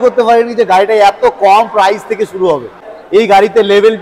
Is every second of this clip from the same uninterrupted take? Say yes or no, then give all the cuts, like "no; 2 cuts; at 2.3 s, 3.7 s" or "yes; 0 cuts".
no; 1 cut; at 2.9 s